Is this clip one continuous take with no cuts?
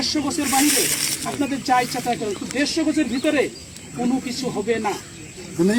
yes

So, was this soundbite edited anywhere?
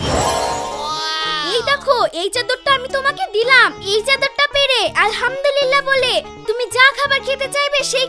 no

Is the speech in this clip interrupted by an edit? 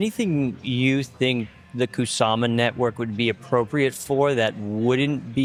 no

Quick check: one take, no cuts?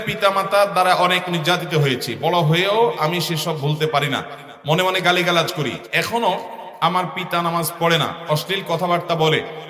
yes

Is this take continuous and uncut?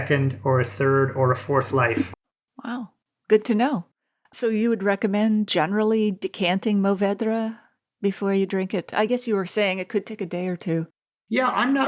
yes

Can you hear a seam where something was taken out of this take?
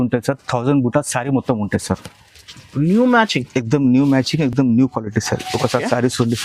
no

